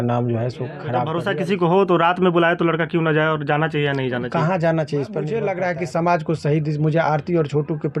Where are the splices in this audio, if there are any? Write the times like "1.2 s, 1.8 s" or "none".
1.1 s, 5.3 s